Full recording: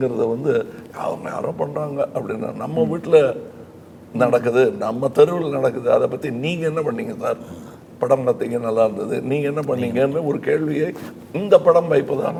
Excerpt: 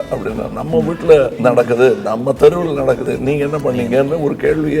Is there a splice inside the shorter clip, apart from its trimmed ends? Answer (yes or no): yes